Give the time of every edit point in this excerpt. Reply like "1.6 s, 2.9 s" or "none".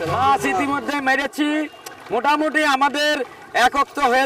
none